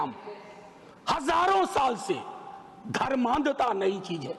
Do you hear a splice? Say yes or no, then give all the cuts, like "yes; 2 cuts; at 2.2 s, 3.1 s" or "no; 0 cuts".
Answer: no; 0 cuts